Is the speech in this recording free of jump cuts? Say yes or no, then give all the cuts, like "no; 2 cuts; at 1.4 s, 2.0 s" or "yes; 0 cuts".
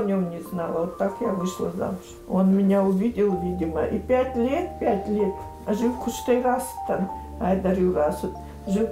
no; 1 cut; at 2.1 s